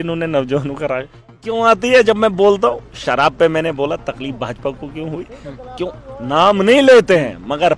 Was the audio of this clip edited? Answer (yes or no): yes